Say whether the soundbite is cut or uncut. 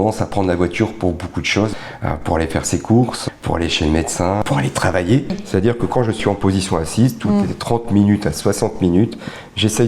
cut